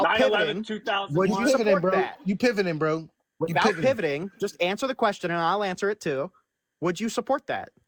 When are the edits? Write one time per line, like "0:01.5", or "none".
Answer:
none